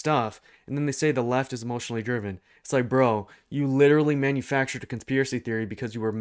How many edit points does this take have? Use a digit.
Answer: 0